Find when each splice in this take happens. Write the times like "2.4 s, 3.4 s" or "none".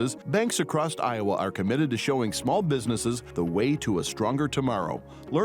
none